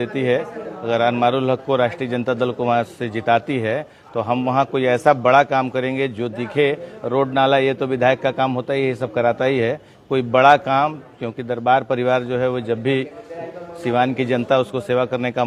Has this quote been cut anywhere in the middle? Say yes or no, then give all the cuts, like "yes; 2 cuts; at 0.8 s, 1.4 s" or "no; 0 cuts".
no; 0 cuts